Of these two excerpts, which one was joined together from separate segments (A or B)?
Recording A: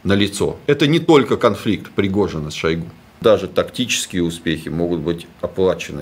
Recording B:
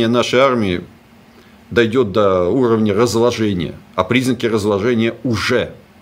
A